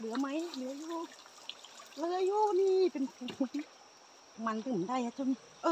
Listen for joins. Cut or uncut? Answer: cut